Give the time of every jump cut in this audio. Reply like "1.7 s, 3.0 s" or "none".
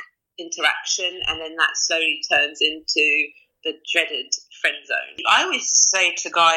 5.2 s